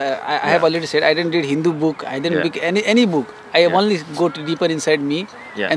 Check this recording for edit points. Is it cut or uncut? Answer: uncut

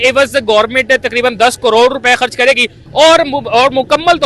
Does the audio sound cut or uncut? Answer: uncut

